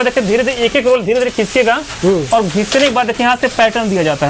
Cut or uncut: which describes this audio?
uncut